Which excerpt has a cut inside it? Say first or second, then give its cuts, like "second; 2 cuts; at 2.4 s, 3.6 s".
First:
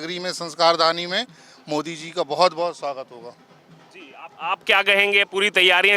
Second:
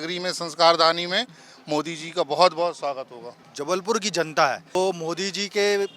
second; 2 cuts; at 3.5 s, 4.8 s